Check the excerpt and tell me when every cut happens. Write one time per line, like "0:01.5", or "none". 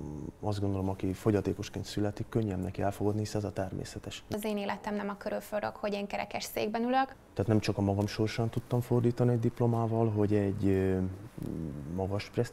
0:04.3
0:07.2